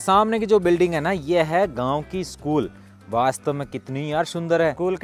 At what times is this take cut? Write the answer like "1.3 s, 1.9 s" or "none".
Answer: none